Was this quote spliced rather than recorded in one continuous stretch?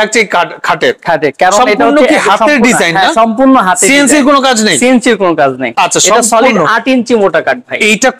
no; 0 cuts

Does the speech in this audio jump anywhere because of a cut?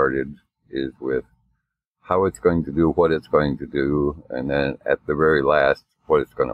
no; 0 cuts

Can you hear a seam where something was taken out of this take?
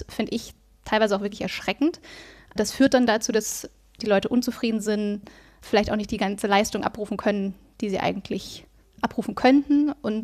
no; 0 cuts

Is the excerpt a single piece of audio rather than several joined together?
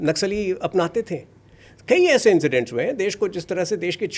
yes; 0 cuts

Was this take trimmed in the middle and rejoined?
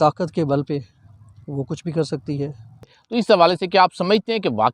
yes; 1 cut; at 2.9 s

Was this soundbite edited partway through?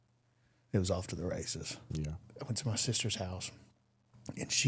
yes; 1 cut; at 2.2 s

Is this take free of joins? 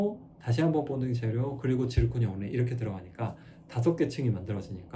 yes; 0 cuts

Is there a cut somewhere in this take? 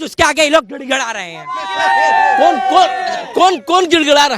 no; 0 cuts

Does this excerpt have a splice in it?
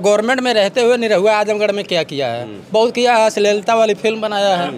no; 0 cuts

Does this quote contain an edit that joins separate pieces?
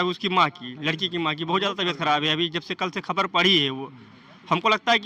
no; 0 cuts

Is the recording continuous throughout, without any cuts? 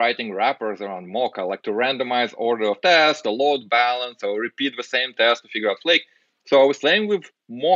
yes; 0 cuts

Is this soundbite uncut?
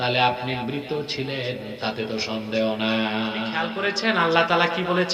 no; 1 cut; at 3.7 s

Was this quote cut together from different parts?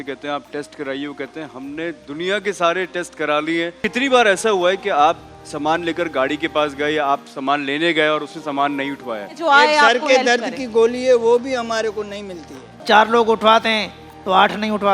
yes; 3 cuts; at 3.8 s, 9.3 s, 12.8 s

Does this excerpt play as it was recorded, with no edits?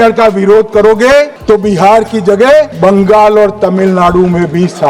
no; 2 cuts; at 1.4 s, 2.7 s

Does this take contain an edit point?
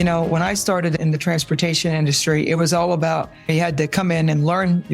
yes; 2 cuts; at 1.0 s, 3.5 s

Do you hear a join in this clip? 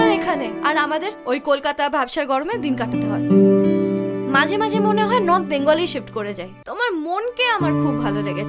yes; 1 cut; at 6.6 s

